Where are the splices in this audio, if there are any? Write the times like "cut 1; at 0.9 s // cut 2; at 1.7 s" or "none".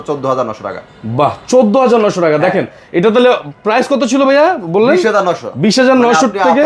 none